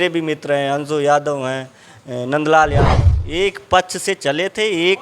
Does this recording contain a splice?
yes; 1 cut; at 2.9 s

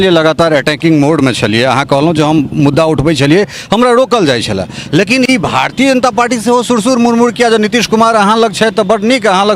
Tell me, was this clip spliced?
no; 0 cuts

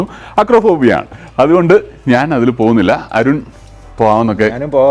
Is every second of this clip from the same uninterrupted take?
yes; 0 cuts

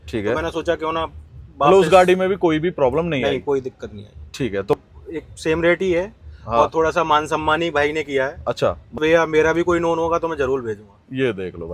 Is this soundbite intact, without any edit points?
no; 2 cuts; at 4.7 s, 9.0 s

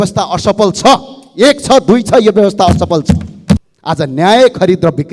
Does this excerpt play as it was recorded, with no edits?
no; 1 cut; at 3.7 s

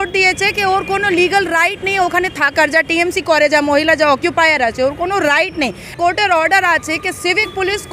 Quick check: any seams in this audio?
yes; 1 cut; at 5.9 s

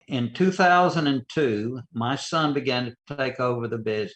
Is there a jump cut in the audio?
yes; 1 cut; at 1.9 s

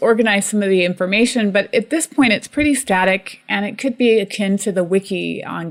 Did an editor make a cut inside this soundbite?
no; 0 cuts

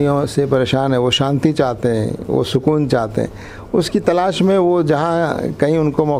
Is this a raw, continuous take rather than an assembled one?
yes; 0 cuts

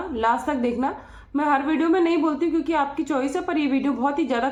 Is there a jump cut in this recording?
no; 0 cuts

